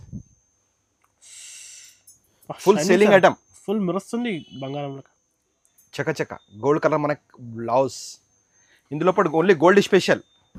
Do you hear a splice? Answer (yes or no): no